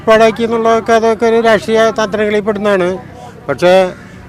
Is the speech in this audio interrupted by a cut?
no; 0 cuts

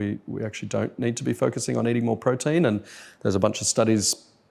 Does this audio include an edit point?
no; 0 cuts

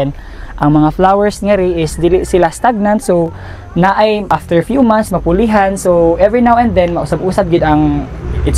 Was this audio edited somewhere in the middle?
yes; 1 cut; at 4.3 s

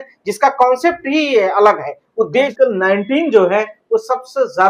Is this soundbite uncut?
no; 1 cut; at 2.5 s

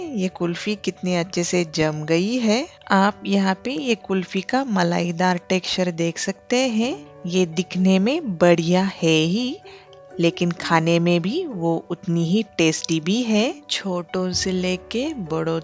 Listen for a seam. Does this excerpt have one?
yes; 1 cut; at 13.6 s

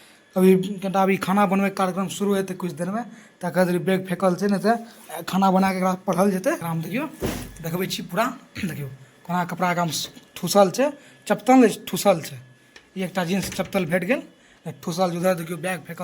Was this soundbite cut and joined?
yes; 1 cut; at 6.6 s

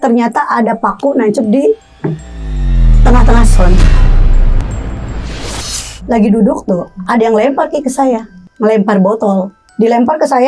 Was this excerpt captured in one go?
no; 3 cuts; at 5.9 s, 8.4 s, 9.6 s

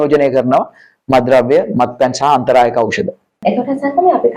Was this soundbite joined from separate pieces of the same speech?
no; 0 cuts

